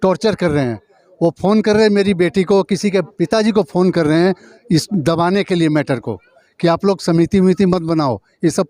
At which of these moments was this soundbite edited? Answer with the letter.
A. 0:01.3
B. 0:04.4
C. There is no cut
C